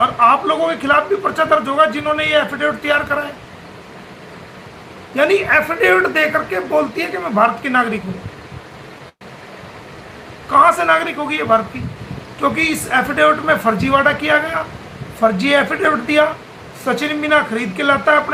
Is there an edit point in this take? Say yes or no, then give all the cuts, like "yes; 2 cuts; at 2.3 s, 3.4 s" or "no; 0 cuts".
no; 0 cuts